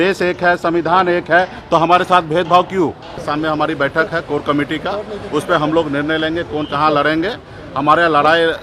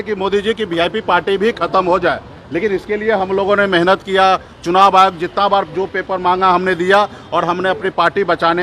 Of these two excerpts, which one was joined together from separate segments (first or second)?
first